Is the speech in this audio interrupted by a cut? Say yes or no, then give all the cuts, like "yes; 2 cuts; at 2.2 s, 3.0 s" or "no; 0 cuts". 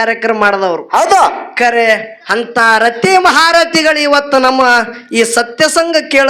no; 0 cuts